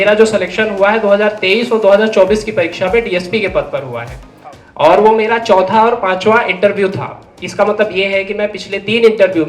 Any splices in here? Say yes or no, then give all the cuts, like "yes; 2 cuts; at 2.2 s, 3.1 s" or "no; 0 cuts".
no; 0 cuts